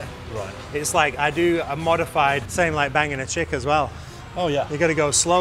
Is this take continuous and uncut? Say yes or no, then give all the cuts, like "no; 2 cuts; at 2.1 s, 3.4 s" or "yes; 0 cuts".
no; 1 cut; at 2.5 s